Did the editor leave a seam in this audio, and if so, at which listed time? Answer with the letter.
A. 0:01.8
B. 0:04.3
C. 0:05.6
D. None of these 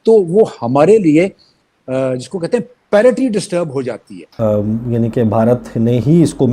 B